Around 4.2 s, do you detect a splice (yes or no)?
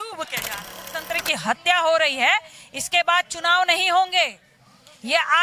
no